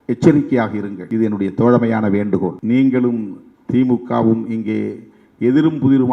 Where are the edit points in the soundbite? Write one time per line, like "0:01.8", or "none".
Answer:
0:01.0
0:02.6